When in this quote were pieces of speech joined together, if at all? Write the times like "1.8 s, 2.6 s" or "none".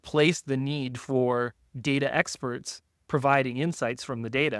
none

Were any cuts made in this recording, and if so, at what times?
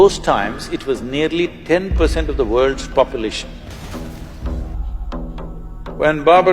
4.8 s

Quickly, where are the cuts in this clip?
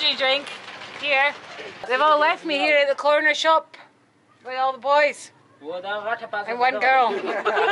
1.7 s

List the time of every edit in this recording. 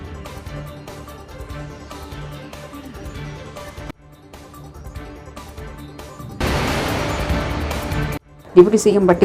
1.5 s

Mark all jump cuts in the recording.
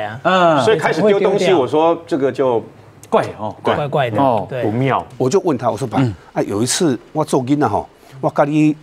5.1 s

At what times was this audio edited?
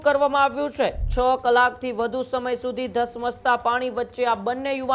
1.0 s

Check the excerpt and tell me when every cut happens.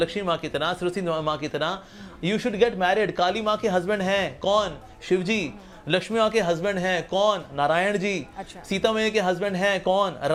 none

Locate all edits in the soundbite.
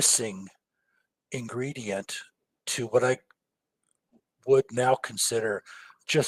none

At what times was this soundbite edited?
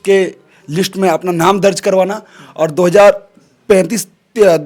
none

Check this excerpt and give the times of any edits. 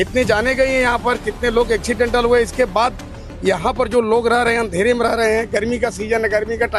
none

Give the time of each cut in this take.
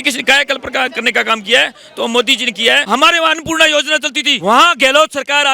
2.8 s, 4.2 s

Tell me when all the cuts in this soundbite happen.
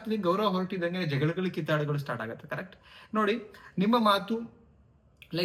none

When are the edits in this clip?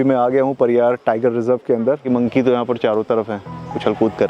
2.1 s

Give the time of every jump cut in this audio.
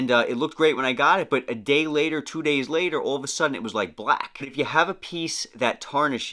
4.5 s

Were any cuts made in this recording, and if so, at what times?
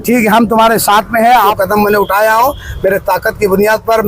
1.6 s

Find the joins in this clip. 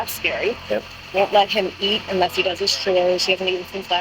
1.0 s

